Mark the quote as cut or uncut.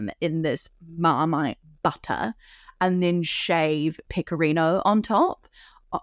uncut